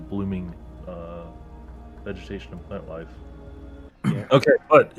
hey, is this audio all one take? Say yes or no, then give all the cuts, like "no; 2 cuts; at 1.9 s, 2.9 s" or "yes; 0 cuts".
no; 1 cut; at 3.8 s